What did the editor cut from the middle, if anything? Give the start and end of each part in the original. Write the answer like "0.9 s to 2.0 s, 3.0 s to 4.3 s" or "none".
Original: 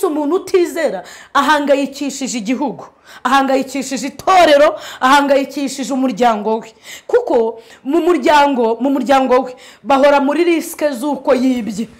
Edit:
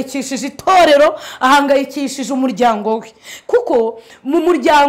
none